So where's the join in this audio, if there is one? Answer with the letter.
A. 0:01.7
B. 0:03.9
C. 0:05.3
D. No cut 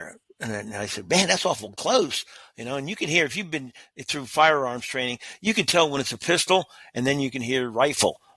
A